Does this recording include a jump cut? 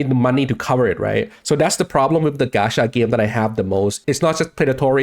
yes; 1 cut; at 4.0 s

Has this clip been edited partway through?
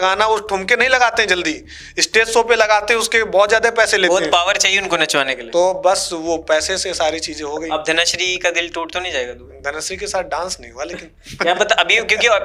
no; 0 cuts

